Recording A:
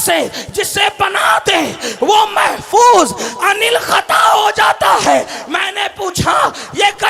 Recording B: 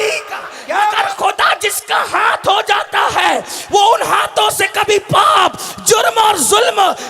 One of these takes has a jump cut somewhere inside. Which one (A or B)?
B